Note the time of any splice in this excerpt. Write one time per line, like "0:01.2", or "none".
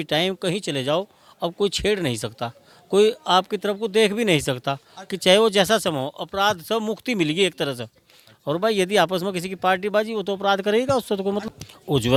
none